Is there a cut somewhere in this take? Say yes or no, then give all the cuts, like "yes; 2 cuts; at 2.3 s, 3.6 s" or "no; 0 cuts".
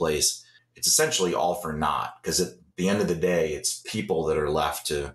no; 0 cuts